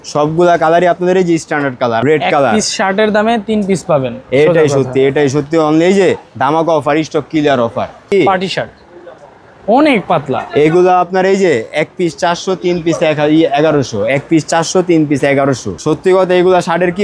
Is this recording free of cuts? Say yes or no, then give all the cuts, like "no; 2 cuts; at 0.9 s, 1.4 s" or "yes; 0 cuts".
no; 3 cuts; at 2.0 s, 8.1 s, 15.7 s